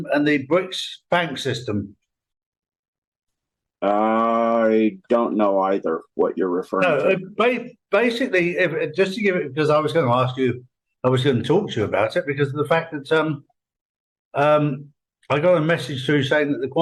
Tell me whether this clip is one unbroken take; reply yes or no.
yes